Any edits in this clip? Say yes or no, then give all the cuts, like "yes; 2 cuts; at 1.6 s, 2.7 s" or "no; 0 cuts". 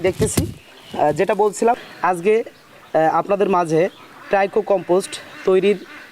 yes; 1 cut; at 1.9 s